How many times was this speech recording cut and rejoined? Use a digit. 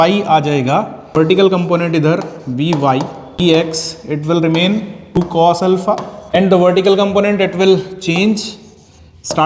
4